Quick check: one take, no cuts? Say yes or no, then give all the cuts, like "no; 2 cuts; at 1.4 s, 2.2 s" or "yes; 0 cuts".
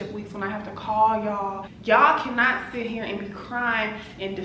no; 1 cut; at 1.7 s